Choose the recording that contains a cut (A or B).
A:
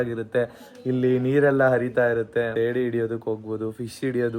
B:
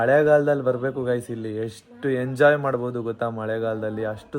A